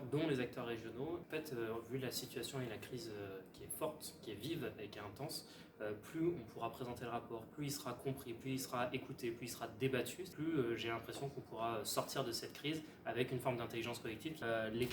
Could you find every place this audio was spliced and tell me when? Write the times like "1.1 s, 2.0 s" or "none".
1.2 s